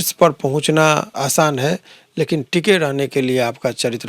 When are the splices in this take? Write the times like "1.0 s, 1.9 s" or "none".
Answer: 1.1 s